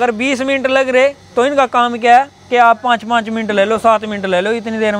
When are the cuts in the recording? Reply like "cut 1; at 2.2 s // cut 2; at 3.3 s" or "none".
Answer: none